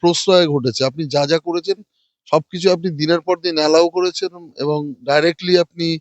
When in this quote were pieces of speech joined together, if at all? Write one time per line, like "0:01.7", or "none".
none

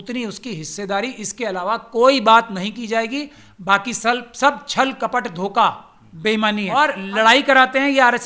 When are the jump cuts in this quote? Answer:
0:07.0

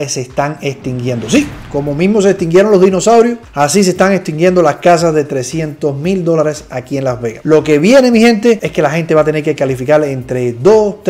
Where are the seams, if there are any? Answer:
none

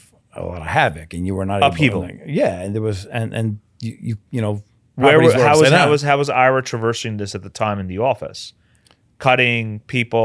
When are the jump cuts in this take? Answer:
none

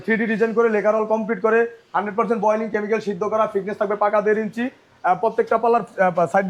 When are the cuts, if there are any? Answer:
none

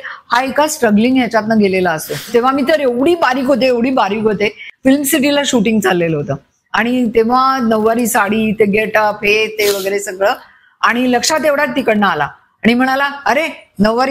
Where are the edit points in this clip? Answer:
0:02.3
0:04.6

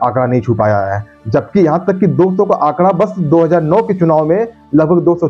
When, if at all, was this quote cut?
none

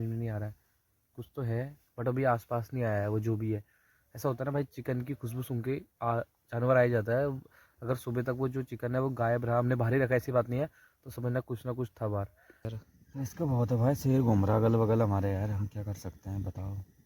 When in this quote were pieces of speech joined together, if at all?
0:12.8

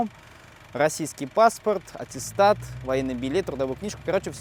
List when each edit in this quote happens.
none

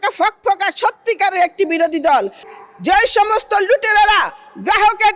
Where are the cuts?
0:02.5

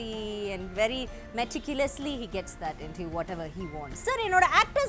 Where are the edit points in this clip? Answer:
0:03.9

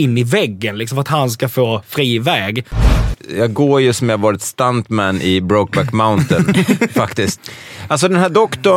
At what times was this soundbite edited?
0:03.0
0:07.4

